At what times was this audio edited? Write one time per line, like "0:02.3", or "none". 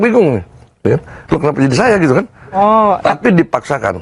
none